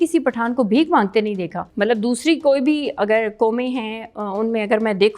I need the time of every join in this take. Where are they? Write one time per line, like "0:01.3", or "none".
none